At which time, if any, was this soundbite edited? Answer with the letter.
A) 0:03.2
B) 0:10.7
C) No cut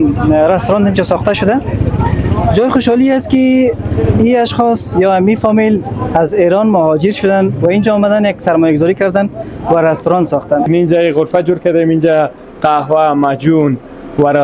B